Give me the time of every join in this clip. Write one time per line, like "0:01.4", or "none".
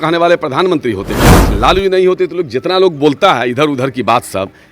0:01.5